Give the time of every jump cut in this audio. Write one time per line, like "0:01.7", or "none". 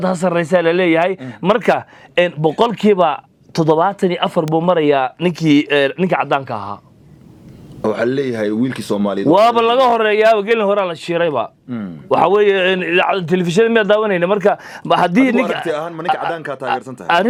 none